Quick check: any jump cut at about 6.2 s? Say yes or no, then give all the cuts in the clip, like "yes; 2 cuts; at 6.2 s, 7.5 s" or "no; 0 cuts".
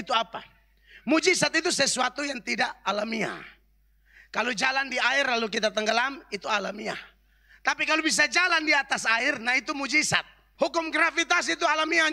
no; 1 cut; at 10.4 s